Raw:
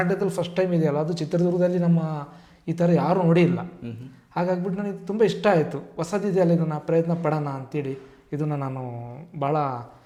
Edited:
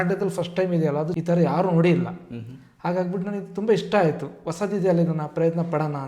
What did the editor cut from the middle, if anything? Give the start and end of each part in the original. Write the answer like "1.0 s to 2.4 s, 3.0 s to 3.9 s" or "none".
1.2 s to 2.7 s